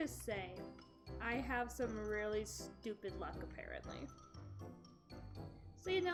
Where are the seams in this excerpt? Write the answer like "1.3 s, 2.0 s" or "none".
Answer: none